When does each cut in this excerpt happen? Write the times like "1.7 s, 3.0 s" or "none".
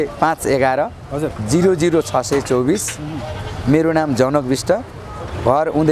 none